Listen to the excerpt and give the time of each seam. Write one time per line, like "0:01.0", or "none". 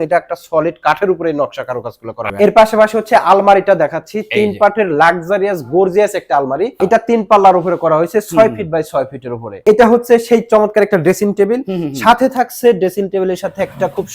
0:02.3
0:06.7
0:09.6